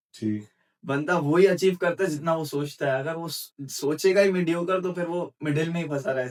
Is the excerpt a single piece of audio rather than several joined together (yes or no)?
yes